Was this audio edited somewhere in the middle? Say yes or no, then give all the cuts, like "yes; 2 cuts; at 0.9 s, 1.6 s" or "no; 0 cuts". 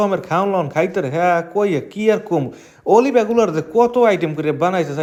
no; 0 cuts